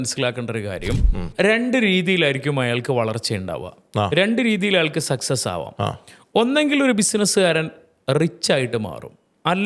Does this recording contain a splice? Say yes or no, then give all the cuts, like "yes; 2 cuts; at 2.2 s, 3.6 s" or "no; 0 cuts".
yes; 1 cut; at 1.3 s